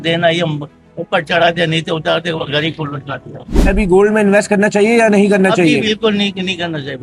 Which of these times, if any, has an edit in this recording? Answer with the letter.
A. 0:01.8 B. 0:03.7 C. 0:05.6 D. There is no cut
B